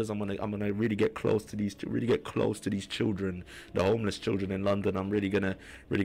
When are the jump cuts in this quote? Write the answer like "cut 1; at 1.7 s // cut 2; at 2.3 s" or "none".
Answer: none